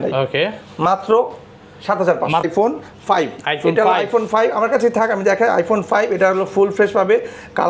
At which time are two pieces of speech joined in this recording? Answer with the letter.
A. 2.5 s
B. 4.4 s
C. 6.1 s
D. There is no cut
A